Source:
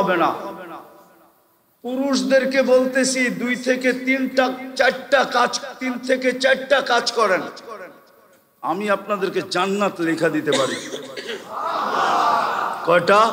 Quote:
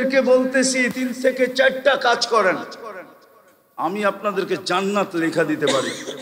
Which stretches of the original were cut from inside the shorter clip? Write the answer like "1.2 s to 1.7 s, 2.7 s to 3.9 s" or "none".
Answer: 3.3 s to 5.8 s